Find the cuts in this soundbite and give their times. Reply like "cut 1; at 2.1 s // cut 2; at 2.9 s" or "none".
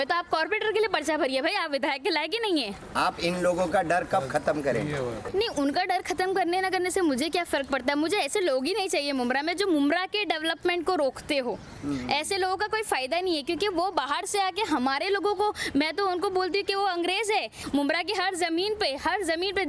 none